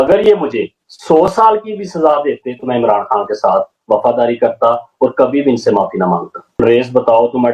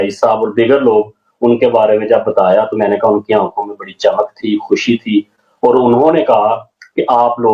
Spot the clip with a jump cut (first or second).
first